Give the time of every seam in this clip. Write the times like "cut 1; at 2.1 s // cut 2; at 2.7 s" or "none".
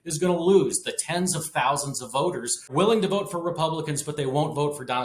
cut 1; at 2.7 s